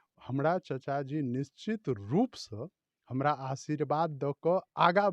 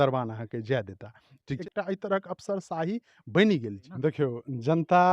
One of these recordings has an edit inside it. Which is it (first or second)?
second